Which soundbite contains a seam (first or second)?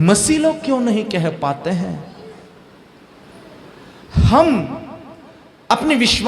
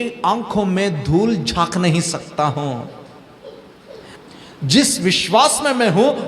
second